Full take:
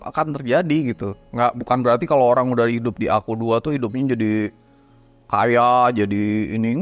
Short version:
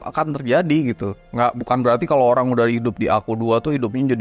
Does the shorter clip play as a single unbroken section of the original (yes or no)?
yes